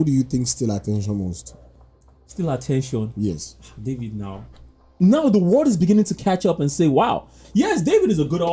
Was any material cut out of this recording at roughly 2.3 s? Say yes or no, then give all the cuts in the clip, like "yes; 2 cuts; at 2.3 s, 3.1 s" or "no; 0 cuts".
no; 1 cut; at 4.9 s